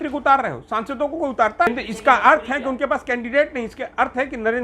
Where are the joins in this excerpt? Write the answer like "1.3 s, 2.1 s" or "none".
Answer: 1.7 s